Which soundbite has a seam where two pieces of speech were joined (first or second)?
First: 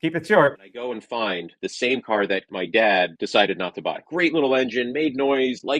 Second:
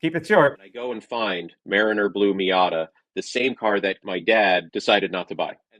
first